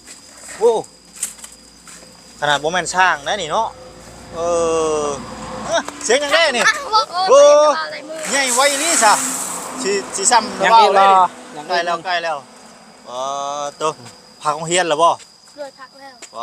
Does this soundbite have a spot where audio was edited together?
yes; 2 cuts; at 5.6 s, 7.0 s

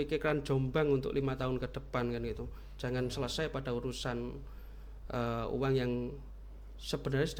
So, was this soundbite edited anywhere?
no; 0 cuts

